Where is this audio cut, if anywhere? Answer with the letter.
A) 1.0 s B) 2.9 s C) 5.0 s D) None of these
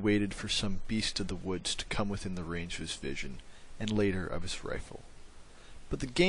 B